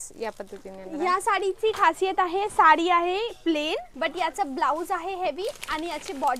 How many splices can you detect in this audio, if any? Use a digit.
1